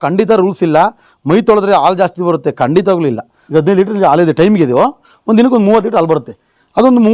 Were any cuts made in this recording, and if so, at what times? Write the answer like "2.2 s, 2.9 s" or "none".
3.3 s